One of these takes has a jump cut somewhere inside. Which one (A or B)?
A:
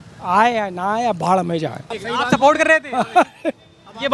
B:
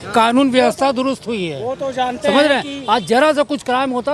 A